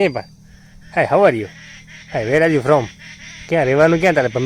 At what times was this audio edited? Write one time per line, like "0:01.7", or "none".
none